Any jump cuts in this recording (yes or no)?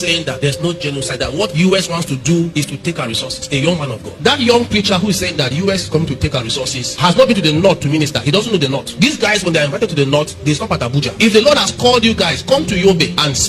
no